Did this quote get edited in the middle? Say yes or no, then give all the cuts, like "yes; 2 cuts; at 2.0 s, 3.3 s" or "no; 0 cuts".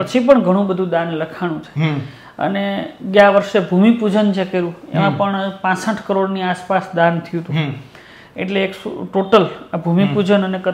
no; 0 cuts